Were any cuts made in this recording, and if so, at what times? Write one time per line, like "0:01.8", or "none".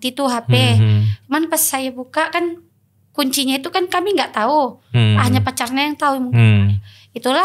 none